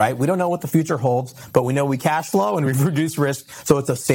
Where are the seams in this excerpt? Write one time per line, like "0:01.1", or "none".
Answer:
none